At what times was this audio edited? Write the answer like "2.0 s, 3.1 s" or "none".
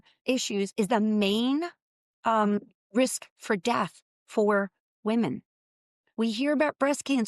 none